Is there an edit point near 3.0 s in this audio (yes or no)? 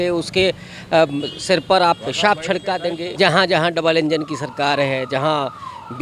yes